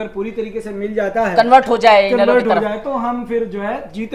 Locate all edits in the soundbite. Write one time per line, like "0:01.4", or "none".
none